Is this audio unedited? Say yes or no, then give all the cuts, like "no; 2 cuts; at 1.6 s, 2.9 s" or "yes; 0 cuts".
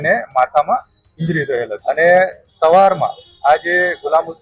no; 1 cut; at 1.8 s